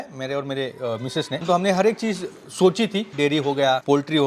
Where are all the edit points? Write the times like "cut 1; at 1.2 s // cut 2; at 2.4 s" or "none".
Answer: cut 1; at 1.4 s // cut 2; at 3.1 s